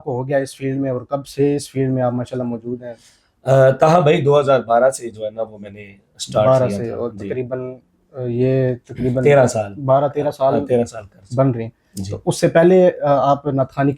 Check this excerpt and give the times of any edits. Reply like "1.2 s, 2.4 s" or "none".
none

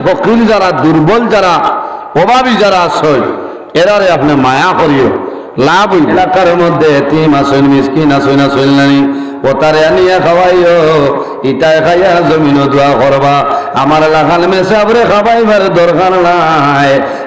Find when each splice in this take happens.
6.1 s

